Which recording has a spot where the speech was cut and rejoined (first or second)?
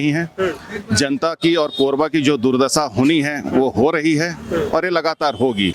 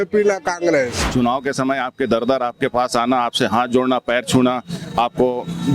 second